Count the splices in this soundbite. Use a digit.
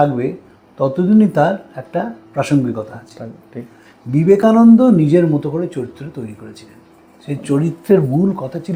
0